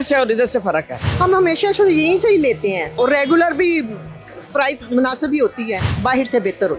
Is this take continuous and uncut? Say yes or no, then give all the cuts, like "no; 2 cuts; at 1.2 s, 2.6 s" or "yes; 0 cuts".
no; 3 cuts; at 1.0 s, 3.0 s, 5.9 s